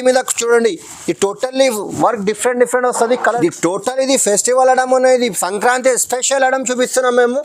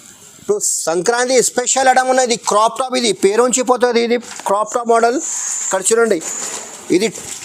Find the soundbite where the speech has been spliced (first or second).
first